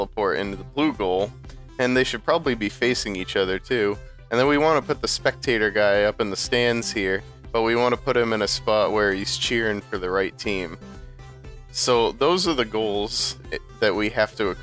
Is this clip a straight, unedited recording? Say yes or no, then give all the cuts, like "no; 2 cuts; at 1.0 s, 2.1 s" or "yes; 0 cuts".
yes; 0 cuts